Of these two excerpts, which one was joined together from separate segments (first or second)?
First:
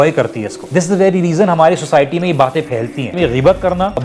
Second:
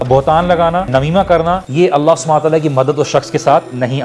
first